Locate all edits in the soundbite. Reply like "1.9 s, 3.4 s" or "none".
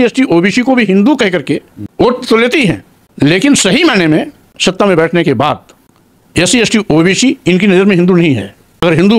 none